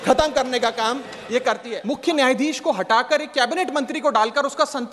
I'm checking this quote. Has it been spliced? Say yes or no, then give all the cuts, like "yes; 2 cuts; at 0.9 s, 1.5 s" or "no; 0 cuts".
yes; 1 cut; at 1.7 s